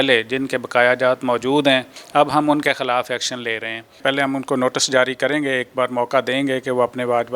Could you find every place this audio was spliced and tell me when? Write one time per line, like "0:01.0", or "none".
0:02.0
0:04.0